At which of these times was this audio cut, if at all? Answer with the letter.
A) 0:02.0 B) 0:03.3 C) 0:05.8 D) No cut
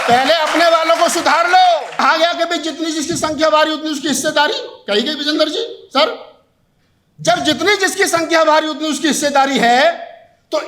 A